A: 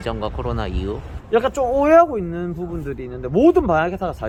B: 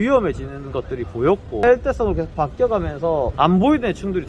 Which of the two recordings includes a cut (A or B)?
B